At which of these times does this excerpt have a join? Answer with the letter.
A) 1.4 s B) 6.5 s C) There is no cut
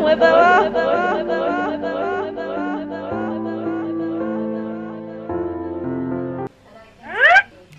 B